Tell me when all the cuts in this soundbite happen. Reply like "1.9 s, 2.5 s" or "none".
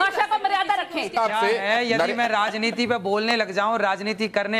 1.1 s